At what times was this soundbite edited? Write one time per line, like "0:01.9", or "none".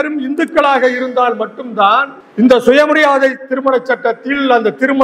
0:02.2